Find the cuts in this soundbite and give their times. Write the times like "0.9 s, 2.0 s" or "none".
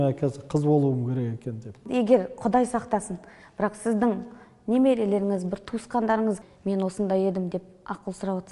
1.8 s, 6.4 s